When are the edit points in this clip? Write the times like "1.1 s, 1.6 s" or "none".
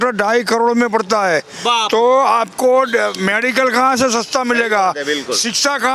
none